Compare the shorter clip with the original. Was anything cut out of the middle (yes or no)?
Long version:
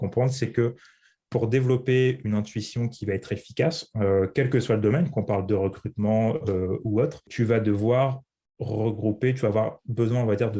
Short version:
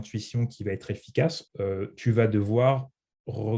yes